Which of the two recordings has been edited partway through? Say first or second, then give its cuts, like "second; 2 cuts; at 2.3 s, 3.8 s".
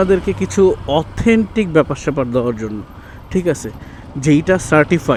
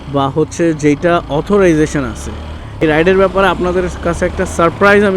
second; 1 cut; at 2.8 s